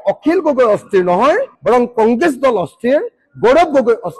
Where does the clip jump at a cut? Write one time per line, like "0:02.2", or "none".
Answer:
none